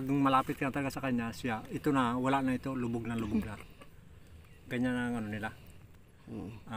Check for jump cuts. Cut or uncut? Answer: uncut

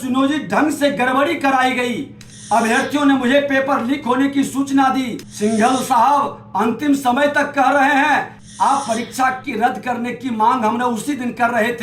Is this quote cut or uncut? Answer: cut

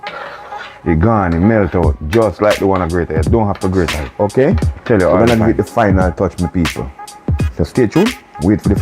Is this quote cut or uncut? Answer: cut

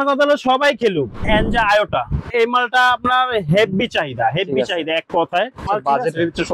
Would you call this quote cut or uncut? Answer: cut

